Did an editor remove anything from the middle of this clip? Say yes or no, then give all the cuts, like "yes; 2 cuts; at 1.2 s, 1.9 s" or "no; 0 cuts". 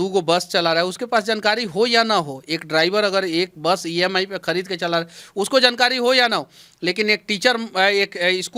no; 0 cuts